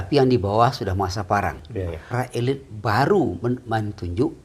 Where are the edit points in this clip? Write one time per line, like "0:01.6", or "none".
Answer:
0:02.1

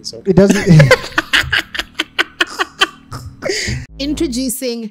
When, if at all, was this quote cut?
0:03.8

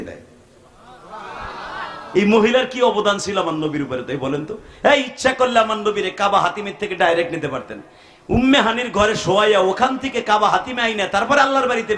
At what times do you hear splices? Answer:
none

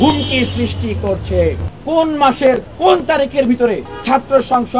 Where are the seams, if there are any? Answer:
0:01.8

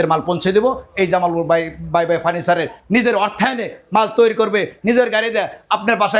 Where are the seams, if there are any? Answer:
none

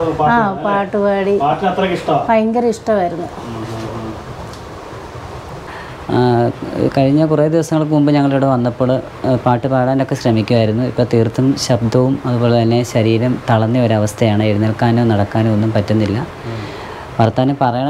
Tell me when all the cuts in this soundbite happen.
0:05.6

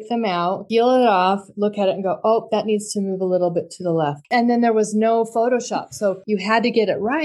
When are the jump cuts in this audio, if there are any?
0:04.2
0:06.2

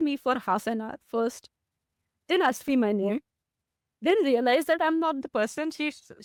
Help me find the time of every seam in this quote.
none

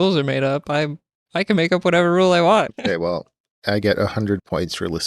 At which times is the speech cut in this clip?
0:02.7

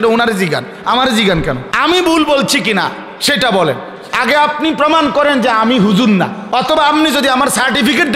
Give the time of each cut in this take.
0:01.7
0:06.4

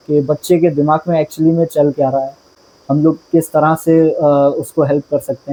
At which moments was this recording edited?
none

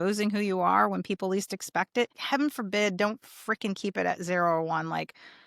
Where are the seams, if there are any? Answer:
0:02.2

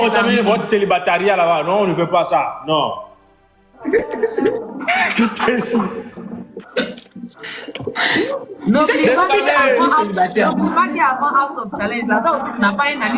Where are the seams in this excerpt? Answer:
none

